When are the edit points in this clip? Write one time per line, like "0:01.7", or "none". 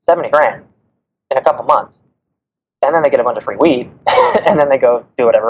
none